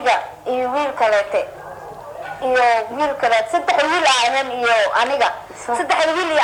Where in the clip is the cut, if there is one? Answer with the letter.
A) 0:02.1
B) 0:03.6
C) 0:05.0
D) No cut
D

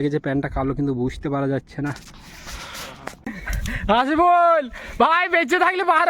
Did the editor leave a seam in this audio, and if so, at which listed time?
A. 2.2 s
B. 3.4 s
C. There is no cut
B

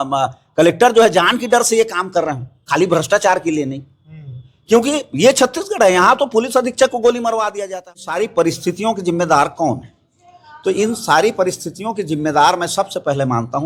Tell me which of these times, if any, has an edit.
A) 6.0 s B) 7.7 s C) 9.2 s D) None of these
B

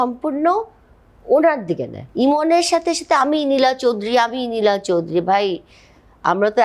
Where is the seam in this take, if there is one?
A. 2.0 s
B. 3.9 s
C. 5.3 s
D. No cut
A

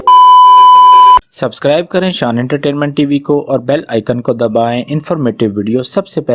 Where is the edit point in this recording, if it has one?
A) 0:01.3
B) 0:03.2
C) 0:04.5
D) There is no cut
A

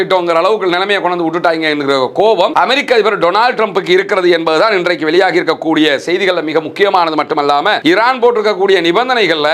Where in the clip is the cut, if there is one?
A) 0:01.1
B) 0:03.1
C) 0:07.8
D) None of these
C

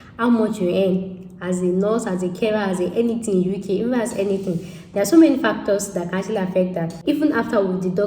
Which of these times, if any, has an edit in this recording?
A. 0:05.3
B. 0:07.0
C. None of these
B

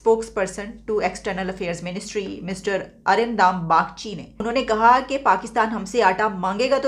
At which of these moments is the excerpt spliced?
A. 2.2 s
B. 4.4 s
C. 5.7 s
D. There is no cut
B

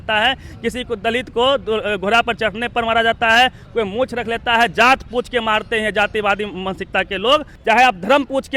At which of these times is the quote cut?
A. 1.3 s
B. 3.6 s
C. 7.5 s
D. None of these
C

